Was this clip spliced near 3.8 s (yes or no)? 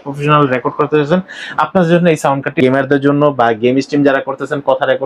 no